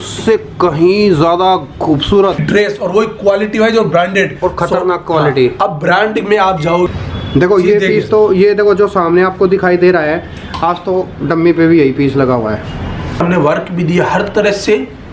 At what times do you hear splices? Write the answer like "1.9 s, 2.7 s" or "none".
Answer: 2.4 s, 6.9 s, 13.2 s